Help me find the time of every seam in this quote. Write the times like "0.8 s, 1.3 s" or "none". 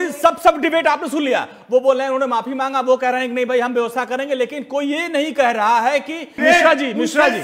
6.3 s